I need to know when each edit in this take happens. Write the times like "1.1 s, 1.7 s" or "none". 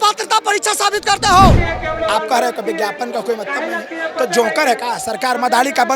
1.6 s